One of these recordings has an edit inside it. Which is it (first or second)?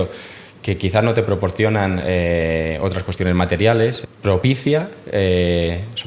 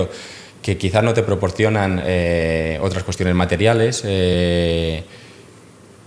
first